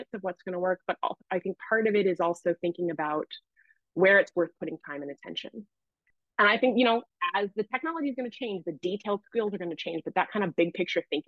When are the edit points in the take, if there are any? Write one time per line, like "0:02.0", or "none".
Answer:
0:05.8